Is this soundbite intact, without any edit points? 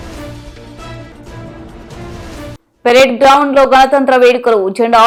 yes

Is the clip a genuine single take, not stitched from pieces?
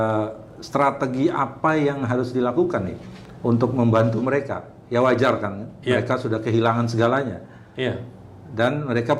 yes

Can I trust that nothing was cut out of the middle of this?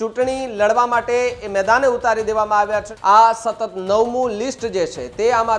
no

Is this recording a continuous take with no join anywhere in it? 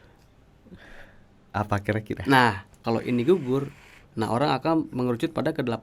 no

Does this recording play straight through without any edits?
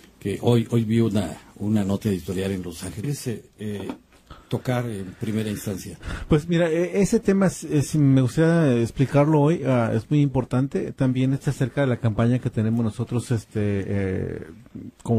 yes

